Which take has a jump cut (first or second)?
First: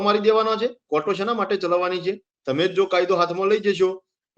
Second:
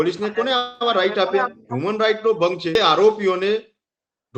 second